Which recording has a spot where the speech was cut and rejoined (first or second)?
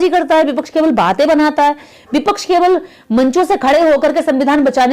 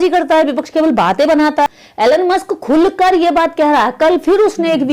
second